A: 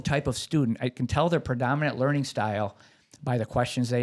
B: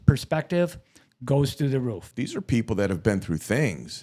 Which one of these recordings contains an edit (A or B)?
B